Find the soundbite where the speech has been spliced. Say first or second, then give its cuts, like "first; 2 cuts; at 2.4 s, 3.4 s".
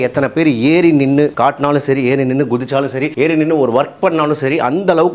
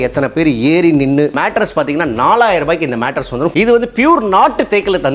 second; 2 cuts; at 1.3 s, 3.5 s